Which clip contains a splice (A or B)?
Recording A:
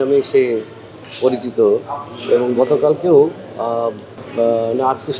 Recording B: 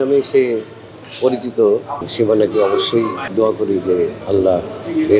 B